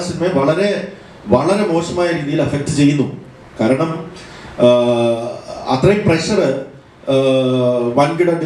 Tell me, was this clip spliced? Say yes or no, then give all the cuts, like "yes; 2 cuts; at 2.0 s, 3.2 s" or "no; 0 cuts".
no; 0 cuts